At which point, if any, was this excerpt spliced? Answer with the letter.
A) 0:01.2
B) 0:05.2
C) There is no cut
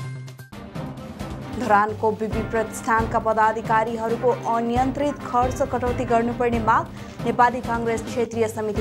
A